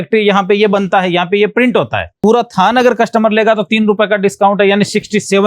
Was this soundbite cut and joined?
yes; 1 cut; at 2.2 s

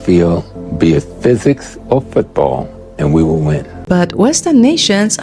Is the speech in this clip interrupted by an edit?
yes; 1 cut; at 3.8 s

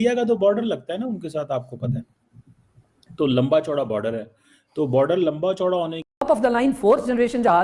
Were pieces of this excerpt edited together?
yes; 1 cut; at 6.2 s

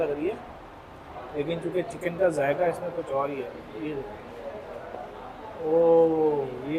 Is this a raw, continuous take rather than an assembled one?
yes; 0 cuts

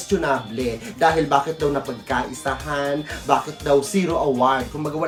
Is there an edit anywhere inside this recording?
no; 0 cuts

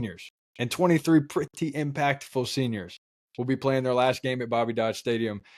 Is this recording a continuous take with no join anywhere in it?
yes; 0 cuts

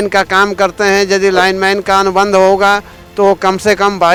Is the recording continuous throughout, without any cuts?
yes; 0 cuts

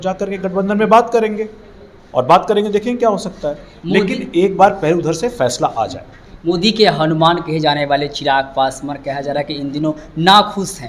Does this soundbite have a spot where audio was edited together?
no; 0 cuts

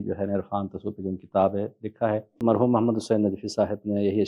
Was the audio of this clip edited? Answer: yes; 1 cut; at 2.4 s

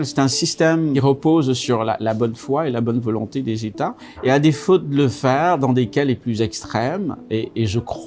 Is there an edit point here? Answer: yes; 2 cuts; at 0.9 s, 4.0 s

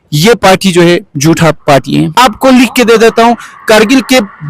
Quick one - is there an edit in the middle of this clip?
yes; 1 cut; at 2.1 s

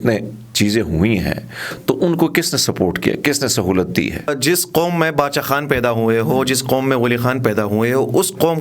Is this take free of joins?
no; 1 cut; at 4.3 s

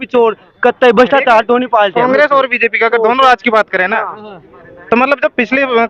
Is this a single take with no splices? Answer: yes; 0 cuts

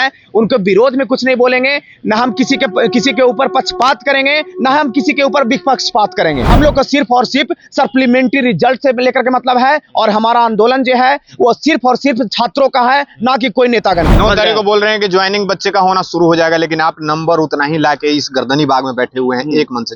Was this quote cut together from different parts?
yes; 2 cuts; at 6.4 s, 14.1 s

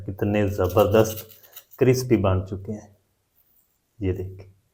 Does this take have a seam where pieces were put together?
no; 0 cuts

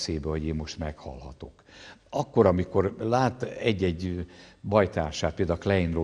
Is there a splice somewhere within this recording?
no; 0 cuts

